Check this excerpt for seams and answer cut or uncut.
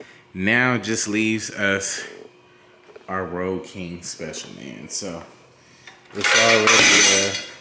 uncut